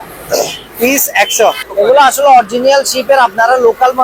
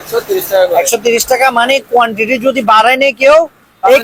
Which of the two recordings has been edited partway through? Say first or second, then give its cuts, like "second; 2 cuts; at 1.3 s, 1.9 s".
first; 1 cut; at 1.6 s